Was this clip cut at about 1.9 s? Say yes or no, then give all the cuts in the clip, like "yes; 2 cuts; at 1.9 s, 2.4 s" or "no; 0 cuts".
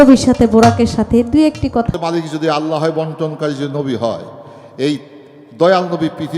yes; 1 cut; at 1.9 s